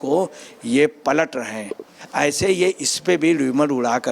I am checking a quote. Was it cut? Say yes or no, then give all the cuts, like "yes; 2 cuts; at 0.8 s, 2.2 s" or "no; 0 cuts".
yes; 1 cut; at 2.0 s